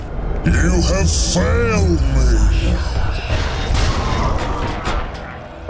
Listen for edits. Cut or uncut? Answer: uncut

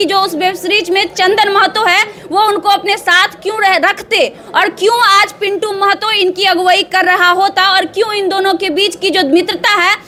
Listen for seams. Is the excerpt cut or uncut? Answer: uncut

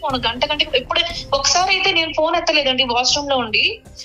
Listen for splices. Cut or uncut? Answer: uncut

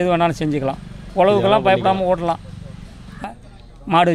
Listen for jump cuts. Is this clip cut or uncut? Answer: cut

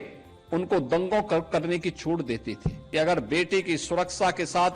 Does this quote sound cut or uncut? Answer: cut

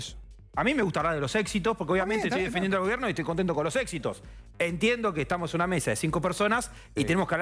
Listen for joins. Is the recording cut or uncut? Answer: uncut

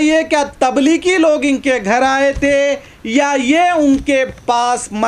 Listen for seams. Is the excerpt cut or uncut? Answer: uncut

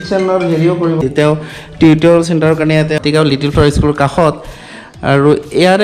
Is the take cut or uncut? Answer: cut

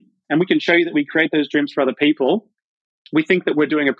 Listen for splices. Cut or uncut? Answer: uncut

